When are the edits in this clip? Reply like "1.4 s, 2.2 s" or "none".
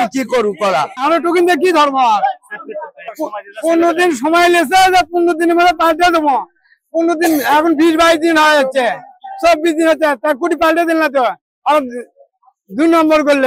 1.0 s